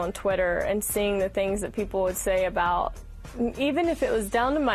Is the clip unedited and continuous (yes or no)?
yes